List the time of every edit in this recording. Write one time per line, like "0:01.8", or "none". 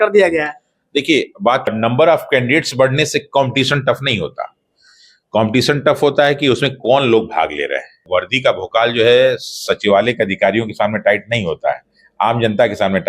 0:01.7
0:08.1